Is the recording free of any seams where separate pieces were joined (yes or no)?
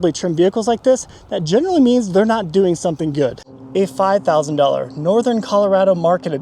no